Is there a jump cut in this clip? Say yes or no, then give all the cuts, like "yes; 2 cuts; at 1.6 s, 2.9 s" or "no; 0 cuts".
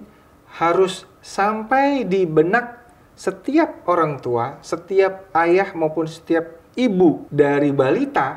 yes; 1 cut; at 7.2 s